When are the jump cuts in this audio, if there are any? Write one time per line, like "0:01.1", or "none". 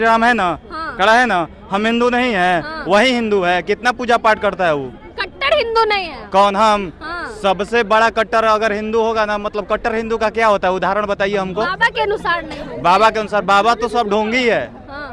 none